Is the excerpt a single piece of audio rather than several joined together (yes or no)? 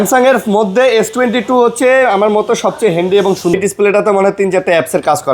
no